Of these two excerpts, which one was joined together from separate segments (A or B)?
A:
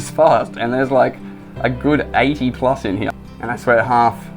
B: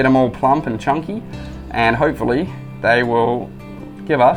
A